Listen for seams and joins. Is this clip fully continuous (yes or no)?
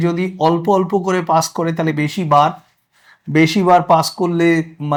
yes